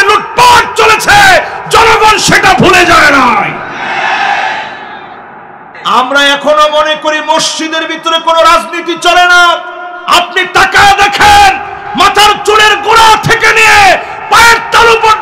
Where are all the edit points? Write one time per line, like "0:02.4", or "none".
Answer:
0:05.7